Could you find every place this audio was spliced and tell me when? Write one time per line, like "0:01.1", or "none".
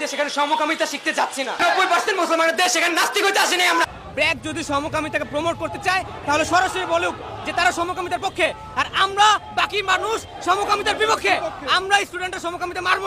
none